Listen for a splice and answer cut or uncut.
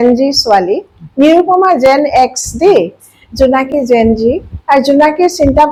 uncut